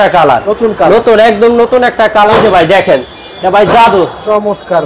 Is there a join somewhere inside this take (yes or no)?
yes